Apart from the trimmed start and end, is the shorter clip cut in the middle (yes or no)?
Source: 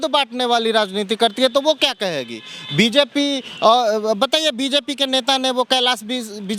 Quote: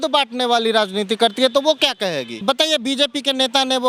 yes